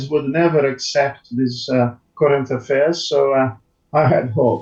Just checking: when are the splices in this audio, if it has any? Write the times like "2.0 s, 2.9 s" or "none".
none